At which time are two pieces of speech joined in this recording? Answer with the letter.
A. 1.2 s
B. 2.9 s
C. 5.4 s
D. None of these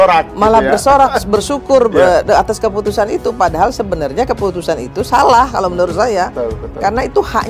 D